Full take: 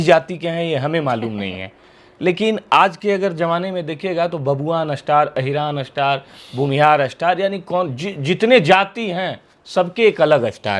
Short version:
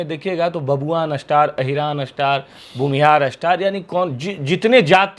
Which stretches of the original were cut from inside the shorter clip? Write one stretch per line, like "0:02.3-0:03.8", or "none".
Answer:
none